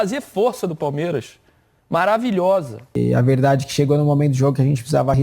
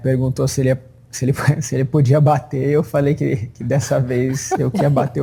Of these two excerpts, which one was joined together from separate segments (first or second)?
first